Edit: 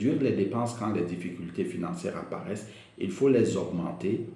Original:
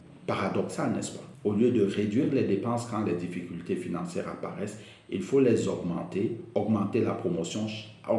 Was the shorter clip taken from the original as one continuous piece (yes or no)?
yes